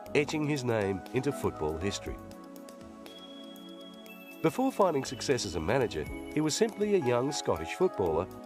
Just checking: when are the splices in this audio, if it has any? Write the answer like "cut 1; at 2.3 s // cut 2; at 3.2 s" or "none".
cut 1; at 5.3 s